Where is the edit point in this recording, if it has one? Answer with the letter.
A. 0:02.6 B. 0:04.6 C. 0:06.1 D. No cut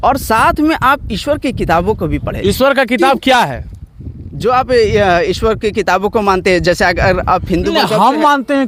D